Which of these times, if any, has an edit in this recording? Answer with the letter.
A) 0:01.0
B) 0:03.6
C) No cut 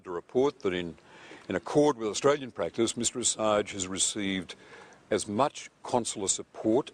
B